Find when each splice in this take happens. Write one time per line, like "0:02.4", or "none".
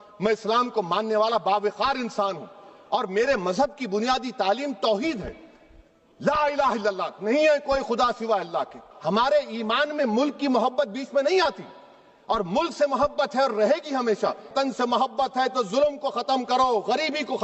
0:08.9
0:14.5

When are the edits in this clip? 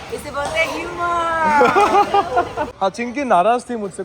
0:02.6

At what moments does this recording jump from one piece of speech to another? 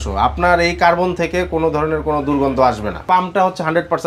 0:03.0

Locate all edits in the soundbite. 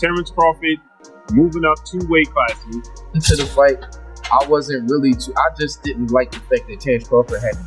0:03.2

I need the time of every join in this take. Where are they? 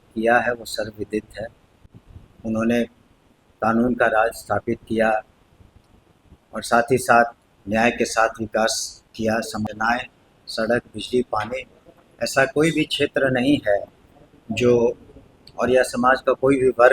0:09.7

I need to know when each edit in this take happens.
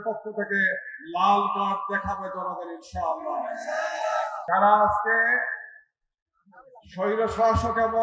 0:04.4

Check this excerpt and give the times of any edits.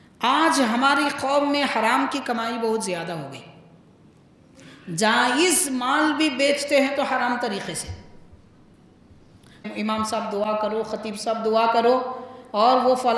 0:09.6

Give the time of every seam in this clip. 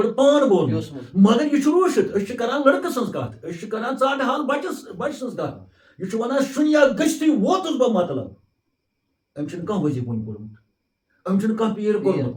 none

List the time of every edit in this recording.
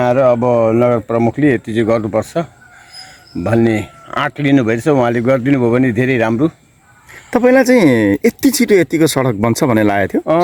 none

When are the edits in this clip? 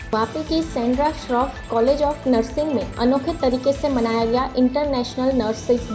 none

